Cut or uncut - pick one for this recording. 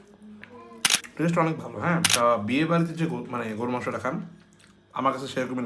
cut